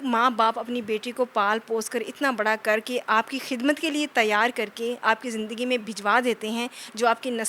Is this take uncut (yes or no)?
yes